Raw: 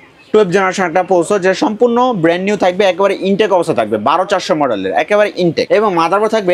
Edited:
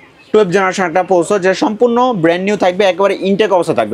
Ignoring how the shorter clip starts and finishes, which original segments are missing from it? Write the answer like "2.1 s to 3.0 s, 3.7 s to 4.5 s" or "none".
none